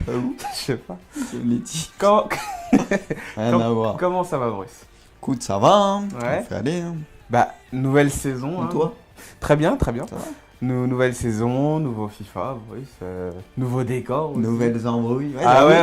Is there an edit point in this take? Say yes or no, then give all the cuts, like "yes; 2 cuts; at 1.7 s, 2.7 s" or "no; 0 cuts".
no; 0 cuts